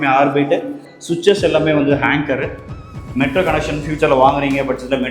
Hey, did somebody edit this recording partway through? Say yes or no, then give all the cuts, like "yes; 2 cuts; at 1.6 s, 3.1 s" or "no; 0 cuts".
yes; 1 cut; at 3.0 s